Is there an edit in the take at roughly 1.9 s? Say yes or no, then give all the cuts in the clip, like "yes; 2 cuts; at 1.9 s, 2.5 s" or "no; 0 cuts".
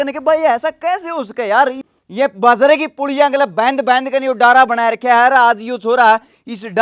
yes; 1 cut; at 1.9 s